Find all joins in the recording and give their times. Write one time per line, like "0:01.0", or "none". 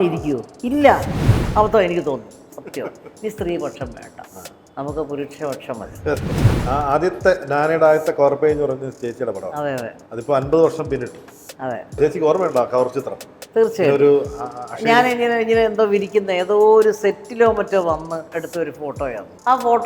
0:01.5
0:06.4